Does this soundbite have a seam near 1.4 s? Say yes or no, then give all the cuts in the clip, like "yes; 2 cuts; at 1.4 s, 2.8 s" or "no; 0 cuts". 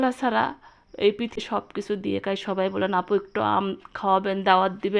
yes; 1 cut; at 1.4 s